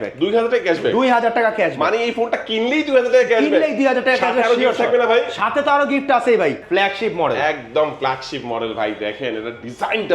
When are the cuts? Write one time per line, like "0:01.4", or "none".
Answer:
0:06.6